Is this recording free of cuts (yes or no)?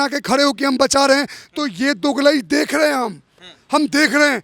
yes